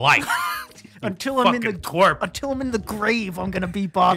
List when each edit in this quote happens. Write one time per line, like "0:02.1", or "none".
none